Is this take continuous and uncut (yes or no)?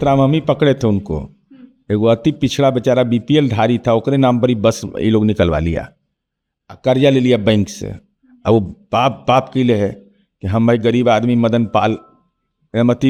yes